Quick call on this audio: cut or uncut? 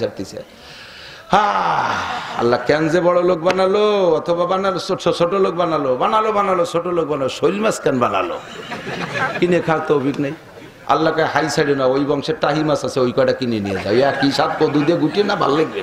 uncut